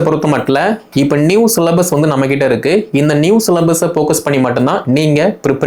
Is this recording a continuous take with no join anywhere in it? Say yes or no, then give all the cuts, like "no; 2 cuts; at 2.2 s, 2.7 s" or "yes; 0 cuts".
yes; 0 cuts